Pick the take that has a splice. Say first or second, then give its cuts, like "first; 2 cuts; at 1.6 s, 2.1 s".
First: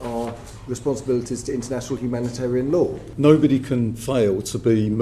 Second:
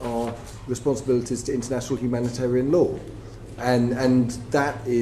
first; 1 cut; at 3.1 s